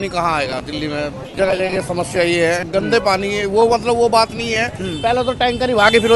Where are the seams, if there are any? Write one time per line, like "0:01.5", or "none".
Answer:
none